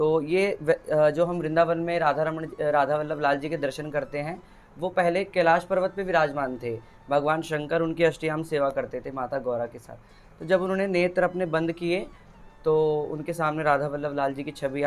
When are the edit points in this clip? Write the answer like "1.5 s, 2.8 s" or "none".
none